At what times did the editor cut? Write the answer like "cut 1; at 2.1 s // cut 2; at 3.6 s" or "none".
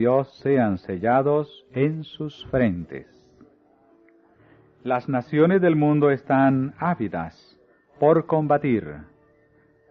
cut 1; at 1.5 s